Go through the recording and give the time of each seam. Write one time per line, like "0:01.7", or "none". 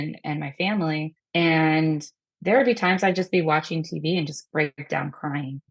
0:01.2